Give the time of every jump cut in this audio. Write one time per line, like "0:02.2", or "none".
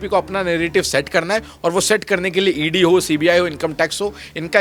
none